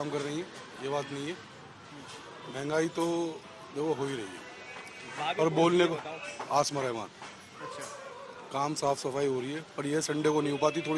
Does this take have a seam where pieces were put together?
no; 0 cuts

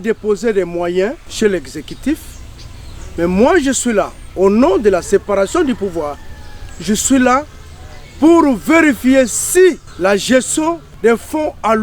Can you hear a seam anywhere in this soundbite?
yes; 3 cuts; at 1.2 s, 9.9 s, 10.9 s

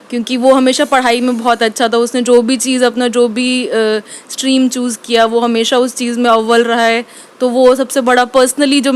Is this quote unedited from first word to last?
yes; 0 cuts

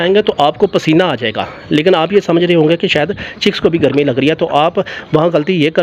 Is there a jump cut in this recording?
no; 0 cuts

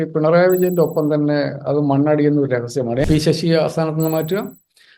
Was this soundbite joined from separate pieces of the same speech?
yes; 1 cut; at 3.1 s

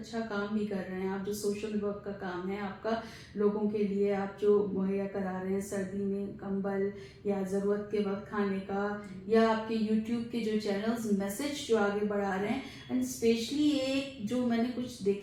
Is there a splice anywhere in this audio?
no; 0 cuts

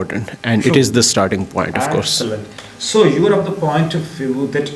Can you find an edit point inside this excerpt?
no; 0 cuts

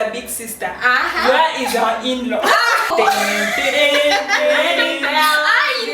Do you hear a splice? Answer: yes; 1 cut; at 2.9 s

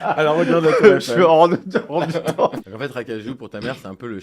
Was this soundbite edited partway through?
yes; 1 cut; at 2.5 s

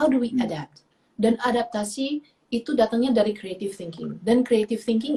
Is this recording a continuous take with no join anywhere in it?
yes; 0 cuts

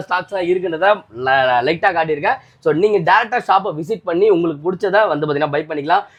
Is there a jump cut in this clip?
no; 0 cuts

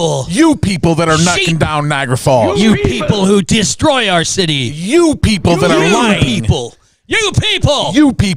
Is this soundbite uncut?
yes; 0 cuts

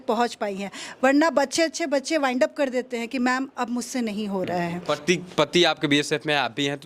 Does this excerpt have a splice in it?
yes; 1 cut; at 4.8 s

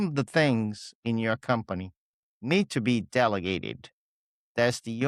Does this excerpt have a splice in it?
no; 0 cuts

